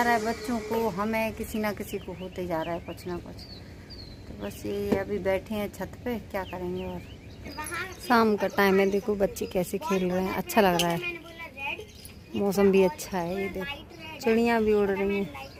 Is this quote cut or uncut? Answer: uncut